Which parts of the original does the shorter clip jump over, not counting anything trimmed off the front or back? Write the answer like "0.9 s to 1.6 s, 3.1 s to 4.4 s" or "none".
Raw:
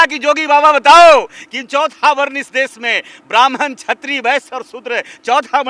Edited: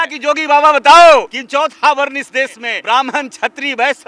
1.4 s to 1.6 s, 2.9 s to 3.1 s